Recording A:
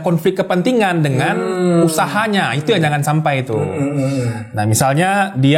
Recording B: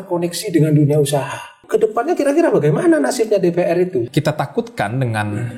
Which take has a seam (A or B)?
B